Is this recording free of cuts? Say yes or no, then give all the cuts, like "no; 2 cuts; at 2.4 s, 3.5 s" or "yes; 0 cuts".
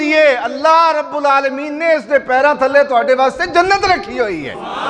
yes; 0 cuts